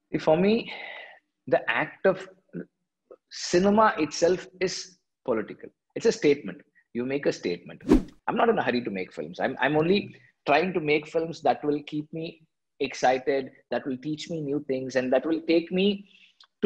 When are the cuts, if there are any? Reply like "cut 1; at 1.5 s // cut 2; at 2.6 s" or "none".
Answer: cut 1; at 7.8 s